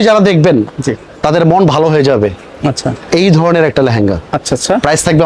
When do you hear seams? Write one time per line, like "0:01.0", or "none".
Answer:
none